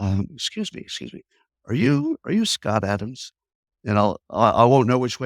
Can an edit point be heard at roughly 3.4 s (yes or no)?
no